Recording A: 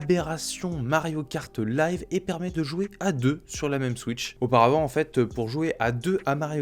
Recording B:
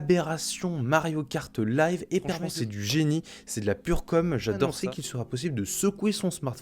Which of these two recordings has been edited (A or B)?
B